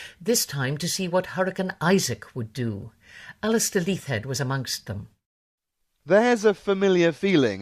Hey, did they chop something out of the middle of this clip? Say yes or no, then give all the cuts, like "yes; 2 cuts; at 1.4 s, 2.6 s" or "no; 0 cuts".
yes; 1 cut; at 5.3 s